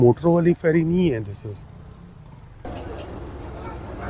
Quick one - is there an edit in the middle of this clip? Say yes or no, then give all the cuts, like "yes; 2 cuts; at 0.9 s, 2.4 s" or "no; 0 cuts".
yes; 1 cut; at 2.6 s